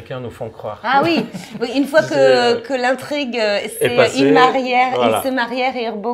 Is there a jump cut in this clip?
no; 0 cuts

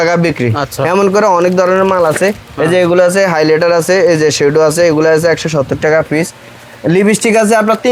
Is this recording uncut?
yes; 0 cuts

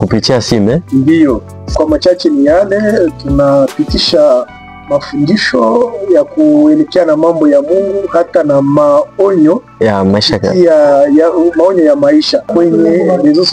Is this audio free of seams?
no; 2 cuts; at 1.7 s, 12.5 s

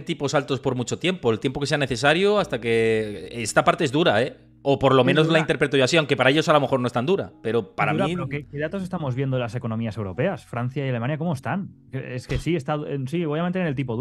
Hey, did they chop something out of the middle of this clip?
no; 0 cuts

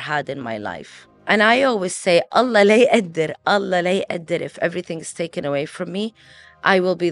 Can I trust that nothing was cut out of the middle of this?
no; 1 cut; at 1.2 s

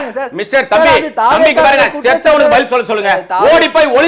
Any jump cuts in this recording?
no; 0 cuts

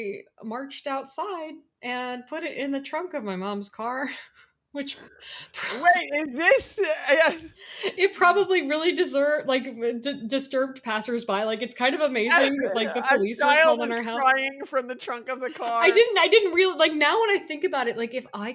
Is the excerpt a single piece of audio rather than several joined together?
yes; 0 cuts

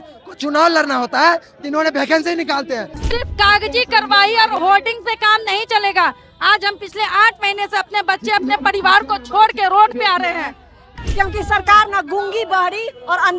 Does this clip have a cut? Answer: yes; 2 cuts; at 2.9 s, 10.9 s

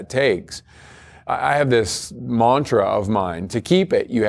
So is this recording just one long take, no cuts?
no; 2 cuts; at 1.7 s, 3.5 s

